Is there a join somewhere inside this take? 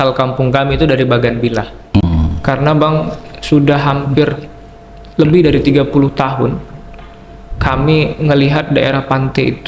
yes; 1 cut; at 2.0 s

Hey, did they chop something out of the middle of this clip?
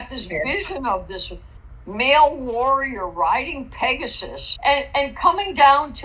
yes; 1 cut; at 4.4 s

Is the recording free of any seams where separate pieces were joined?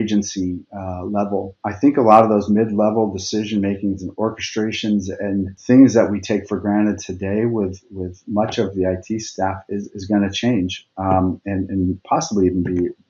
no; 2 cuts; at 1.7 s, 5.6 s

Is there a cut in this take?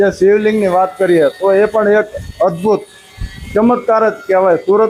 no; 0 cuts

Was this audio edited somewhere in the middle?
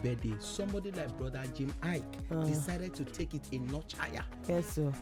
no; 0 cuts

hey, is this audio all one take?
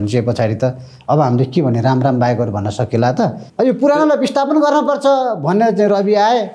no; 1 cut; at 3.4 s

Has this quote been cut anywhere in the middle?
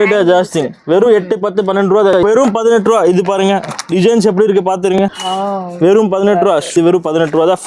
yes; 3 cuts; at 2.2 s, 5.2 s, 6.8 s

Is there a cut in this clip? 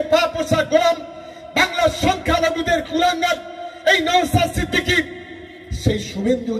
no; 0 cuts

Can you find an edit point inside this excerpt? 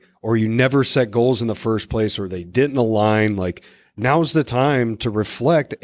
no; 0 cuts

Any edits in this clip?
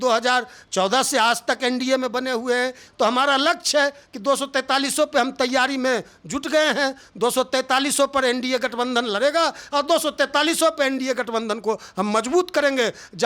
no; 0 cuts

